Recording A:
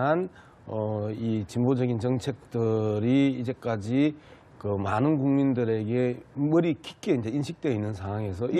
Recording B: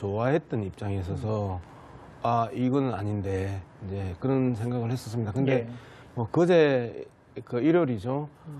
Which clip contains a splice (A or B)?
A